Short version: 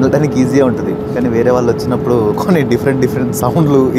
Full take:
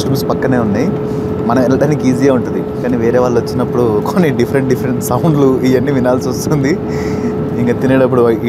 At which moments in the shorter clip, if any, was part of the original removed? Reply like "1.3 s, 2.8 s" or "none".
none

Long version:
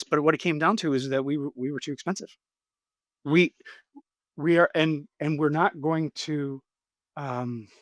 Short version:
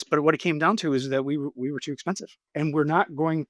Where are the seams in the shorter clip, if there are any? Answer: 2.4 s

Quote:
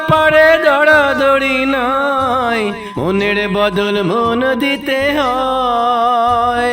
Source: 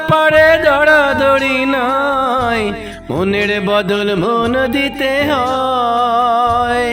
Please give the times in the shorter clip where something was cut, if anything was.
2.9 s

